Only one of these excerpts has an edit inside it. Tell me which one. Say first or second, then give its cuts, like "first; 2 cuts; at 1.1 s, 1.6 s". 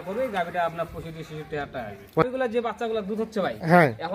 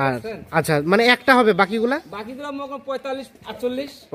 first; 1 cut; at 2.1 s